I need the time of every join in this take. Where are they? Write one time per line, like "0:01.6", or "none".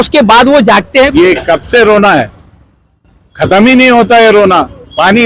0:01.1

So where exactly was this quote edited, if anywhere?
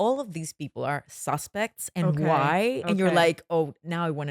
none

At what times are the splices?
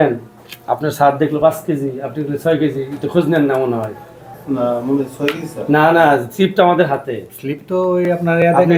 none

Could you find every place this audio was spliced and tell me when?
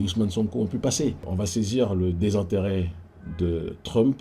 0:01.3

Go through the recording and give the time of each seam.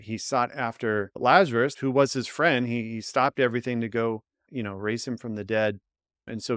0:01.1
0:01.8

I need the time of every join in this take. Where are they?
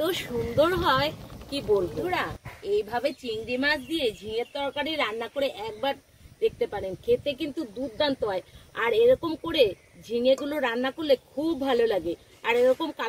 0:02.0

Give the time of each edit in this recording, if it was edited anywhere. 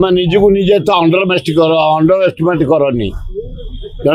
none

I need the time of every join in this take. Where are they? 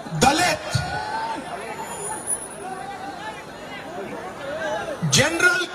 none

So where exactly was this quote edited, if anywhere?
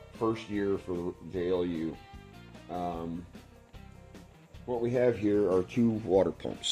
none

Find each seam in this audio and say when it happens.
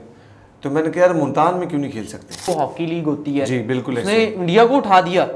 0:02.5

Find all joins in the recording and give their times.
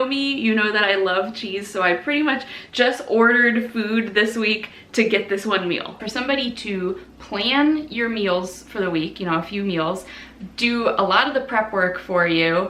0:06.1

